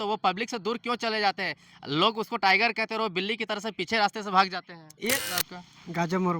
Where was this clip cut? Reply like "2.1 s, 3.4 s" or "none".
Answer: 5.2 s